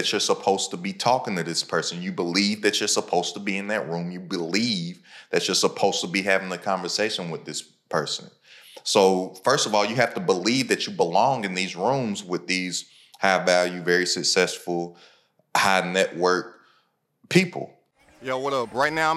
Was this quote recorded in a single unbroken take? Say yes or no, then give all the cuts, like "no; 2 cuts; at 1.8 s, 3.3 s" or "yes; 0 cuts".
no; 1 cut; at 18.1 s